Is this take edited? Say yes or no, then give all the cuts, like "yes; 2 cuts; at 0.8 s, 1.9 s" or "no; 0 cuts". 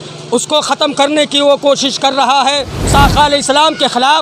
yes; 1 cut; at 2.9 s